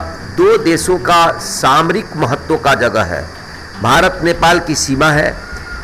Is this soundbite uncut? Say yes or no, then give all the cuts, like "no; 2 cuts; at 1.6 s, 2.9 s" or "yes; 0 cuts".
yes; 0 cuts